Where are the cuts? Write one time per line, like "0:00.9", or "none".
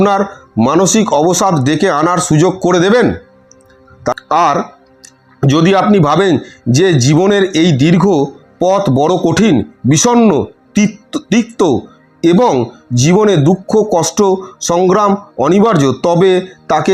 0:04.0